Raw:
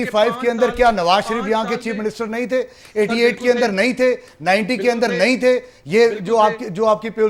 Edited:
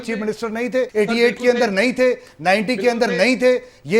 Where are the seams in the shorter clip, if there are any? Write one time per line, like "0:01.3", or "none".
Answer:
0:00.9